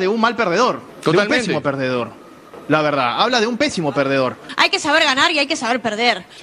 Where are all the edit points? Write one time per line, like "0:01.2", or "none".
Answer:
0:00.9
0:04.4